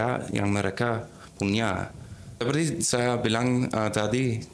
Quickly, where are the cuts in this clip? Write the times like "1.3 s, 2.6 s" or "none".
2.4 s